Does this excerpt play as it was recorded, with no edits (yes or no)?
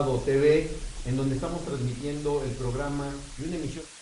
yes